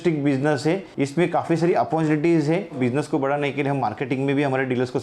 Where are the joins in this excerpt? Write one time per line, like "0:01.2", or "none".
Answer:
0:02.8